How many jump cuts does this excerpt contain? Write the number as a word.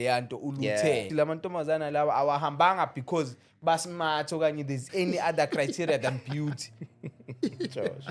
one